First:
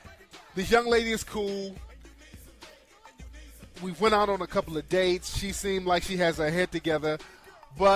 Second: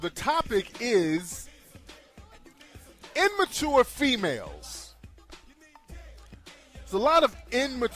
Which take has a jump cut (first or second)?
first